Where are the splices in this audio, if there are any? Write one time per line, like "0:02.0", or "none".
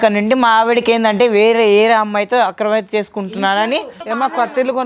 0:04.0